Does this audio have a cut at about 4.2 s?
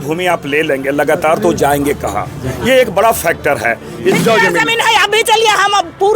yes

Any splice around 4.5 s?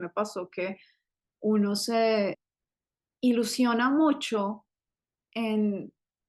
no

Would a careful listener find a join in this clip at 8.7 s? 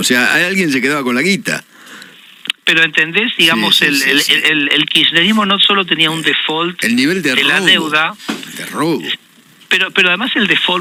no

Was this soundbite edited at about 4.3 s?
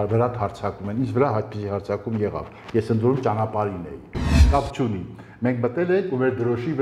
yes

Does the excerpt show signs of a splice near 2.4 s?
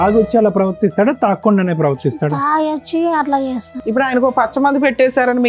no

